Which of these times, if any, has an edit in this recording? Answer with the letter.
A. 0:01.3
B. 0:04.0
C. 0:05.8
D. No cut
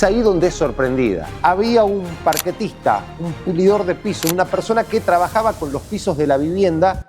A